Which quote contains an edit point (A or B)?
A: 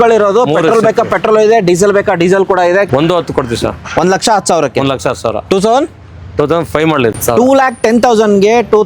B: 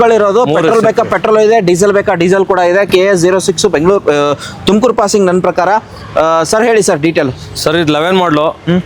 A